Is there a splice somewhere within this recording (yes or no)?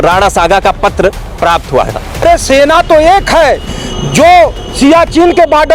yes